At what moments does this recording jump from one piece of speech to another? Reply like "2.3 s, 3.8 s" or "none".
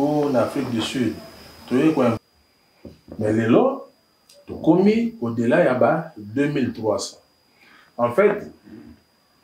2.2 s